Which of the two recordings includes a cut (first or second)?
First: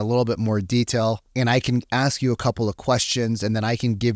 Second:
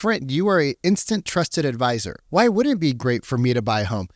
first